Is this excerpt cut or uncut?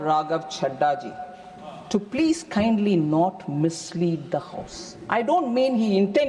uncut